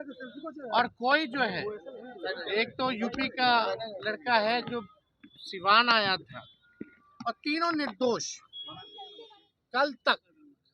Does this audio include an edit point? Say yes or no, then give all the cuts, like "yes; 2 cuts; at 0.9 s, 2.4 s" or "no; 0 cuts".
yes; 1 cut; at 9.2 s